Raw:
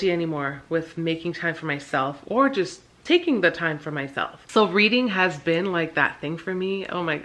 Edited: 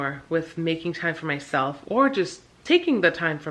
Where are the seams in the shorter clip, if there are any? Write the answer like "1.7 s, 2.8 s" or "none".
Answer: none